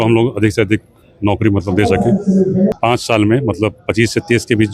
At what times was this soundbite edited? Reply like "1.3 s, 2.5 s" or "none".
2.8 s